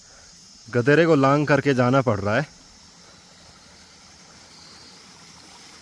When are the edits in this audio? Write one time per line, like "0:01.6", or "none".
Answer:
0:04.5

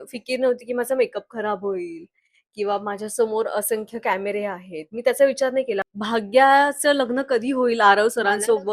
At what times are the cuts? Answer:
0:05.9

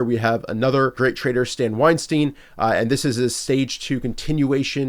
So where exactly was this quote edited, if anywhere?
0:01.0

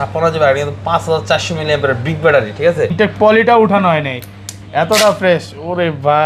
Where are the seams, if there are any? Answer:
0:02.9

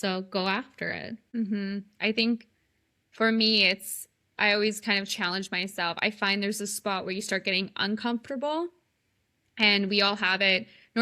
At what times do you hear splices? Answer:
0:01.2

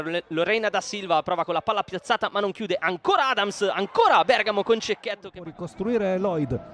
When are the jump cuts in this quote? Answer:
0:05.4

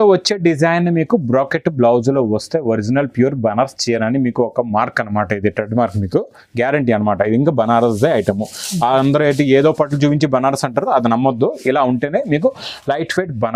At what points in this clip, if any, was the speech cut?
none

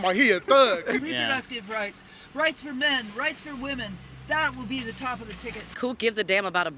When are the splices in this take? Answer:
0:01.0
0:05.8

